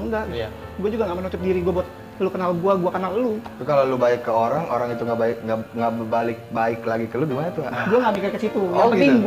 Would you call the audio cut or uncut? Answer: uncut